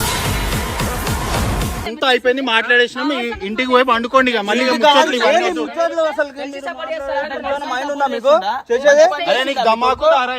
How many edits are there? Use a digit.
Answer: 1